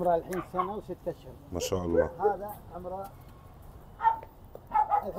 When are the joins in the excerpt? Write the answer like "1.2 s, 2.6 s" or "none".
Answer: none